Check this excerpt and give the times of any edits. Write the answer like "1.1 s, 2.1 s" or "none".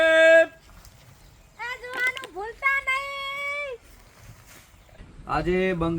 5.0 s